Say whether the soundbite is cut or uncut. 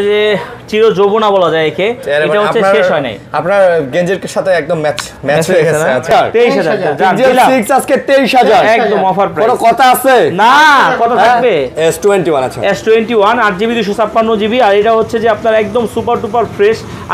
cut